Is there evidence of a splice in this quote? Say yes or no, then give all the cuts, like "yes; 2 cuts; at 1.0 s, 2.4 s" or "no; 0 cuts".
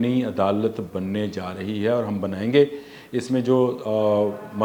no; 0 cuts